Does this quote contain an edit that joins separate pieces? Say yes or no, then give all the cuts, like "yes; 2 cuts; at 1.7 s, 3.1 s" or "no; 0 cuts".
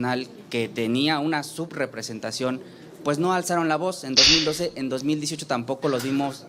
no; 0 cuts